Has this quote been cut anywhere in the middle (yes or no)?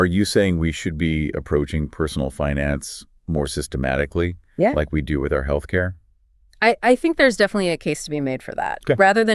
no